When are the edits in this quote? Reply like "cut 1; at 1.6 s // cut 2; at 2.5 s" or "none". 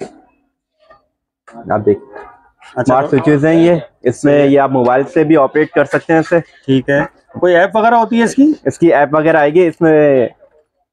none

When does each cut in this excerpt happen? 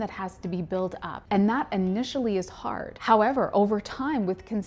cut 1; at 1.1 s // cut 2; at 2.9 s

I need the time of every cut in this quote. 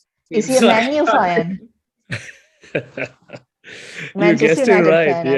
none

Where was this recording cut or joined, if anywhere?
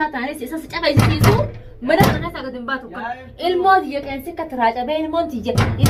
none

